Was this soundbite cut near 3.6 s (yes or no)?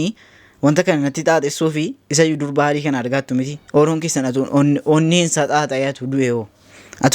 yes